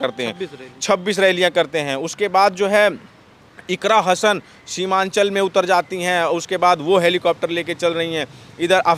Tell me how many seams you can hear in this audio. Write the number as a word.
zero